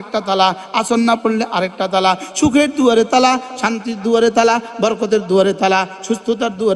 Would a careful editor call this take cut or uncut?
uncut